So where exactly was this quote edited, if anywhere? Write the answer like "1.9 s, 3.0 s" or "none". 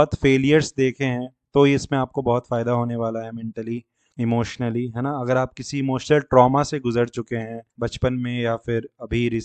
4.0 s, 7.7 s